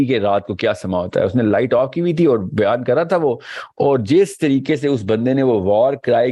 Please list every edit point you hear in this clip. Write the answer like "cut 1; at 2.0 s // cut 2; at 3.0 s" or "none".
none